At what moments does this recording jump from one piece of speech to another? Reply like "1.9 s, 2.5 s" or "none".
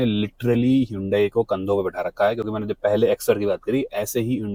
none